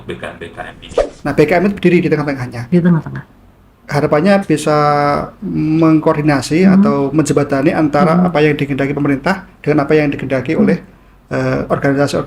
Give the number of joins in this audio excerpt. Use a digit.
1